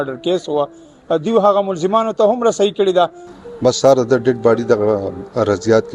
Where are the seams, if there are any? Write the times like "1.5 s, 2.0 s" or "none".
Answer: 3.2 s